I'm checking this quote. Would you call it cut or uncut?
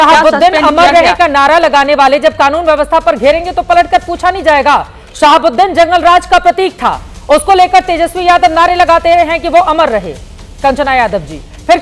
uncut